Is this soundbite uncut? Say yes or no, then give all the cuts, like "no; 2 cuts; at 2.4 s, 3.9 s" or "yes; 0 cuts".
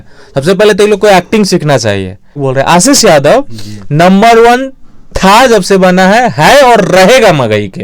no; 1 cut; at 2.4 s